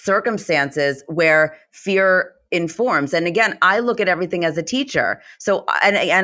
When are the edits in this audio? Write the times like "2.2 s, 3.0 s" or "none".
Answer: none